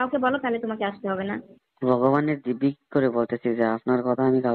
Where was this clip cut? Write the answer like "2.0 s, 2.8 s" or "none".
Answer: none